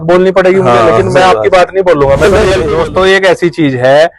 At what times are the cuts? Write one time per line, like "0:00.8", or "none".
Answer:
0:02.7